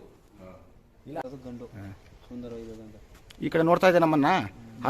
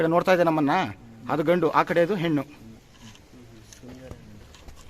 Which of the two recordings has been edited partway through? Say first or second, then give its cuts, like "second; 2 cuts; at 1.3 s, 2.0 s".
first; 1 cut; at 1.2 s